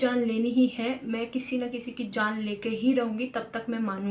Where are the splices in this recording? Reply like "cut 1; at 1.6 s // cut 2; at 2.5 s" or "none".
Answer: none